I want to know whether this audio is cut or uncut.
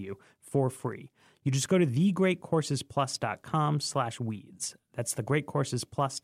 uncut